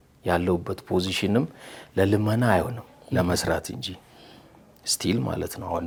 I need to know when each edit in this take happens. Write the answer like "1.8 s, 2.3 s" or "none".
none